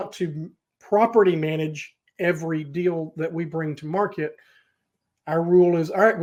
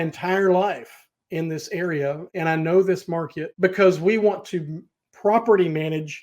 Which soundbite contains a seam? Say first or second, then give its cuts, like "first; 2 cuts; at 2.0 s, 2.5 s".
second; 2 cuts; at 2.2 s, 3.4 s